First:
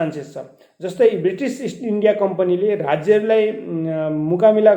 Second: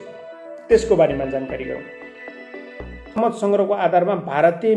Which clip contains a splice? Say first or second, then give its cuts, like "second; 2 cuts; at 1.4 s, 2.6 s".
second; 1 cut; at 3.2 s